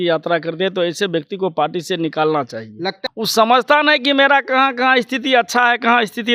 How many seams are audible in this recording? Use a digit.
1